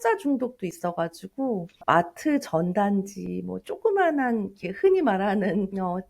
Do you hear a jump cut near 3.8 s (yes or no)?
no